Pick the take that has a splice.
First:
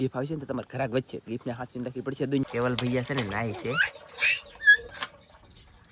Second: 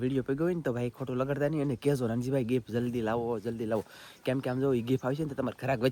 first; 1 cut; at 2.4 s

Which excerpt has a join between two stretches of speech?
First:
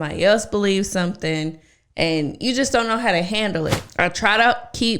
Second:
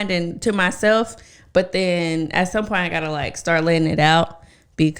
first; 1 cut; at 3.8 s

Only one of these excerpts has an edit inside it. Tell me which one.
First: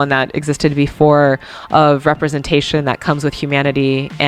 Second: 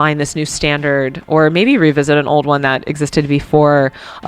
second; 1 cut; at 1.2 s

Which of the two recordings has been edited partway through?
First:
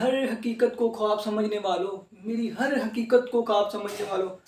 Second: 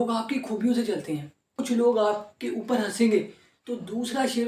second; 1 cut; at 1.5 s

